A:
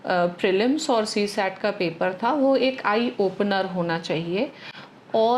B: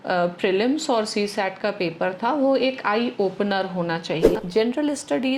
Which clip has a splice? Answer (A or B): B